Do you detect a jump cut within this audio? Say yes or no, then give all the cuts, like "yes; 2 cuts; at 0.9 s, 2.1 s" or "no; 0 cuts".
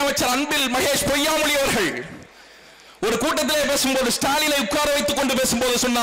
no; 0 cuts